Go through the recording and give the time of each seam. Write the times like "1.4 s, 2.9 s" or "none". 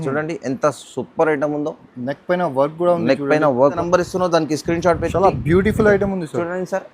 3.8 s